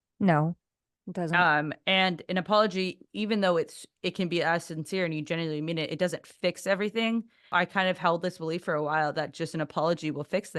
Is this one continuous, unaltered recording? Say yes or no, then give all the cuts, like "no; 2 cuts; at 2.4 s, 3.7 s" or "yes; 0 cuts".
no; 1 cut; at 7.4 s